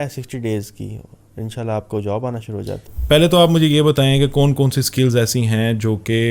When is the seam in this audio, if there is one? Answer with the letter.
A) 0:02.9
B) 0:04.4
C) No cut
A